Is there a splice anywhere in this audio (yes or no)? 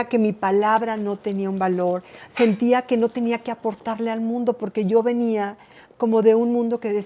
no